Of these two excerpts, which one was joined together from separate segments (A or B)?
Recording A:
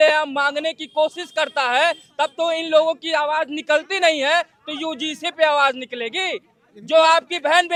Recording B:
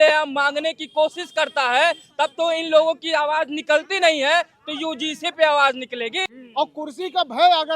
B